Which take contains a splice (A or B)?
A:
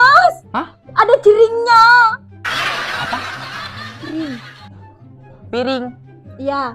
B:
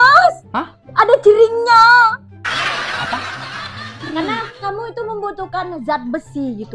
B